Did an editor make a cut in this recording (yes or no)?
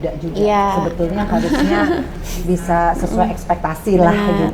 no